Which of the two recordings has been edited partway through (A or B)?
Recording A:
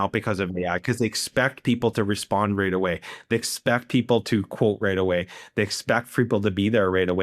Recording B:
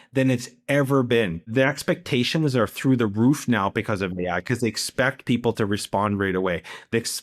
B